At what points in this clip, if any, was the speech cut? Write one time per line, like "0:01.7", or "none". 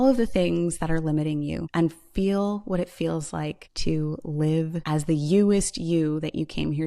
0:01.6
0:03.7
0:04.8